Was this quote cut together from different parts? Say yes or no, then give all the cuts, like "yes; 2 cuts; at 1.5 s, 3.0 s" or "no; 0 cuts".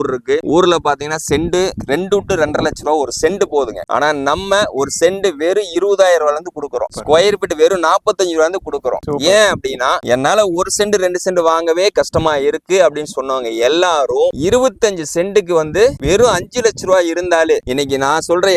no; 0 cuts